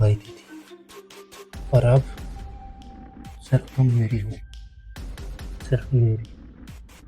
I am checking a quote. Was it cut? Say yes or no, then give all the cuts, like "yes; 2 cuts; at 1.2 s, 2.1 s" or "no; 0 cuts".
yes; 2 cuts; at 2.1 s, 3.5 s